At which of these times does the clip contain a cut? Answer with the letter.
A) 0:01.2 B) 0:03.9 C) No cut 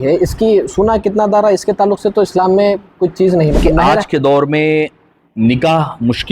B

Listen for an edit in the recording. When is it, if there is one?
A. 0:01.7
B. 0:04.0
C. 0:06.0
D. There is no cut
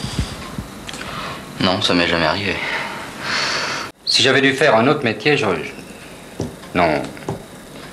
B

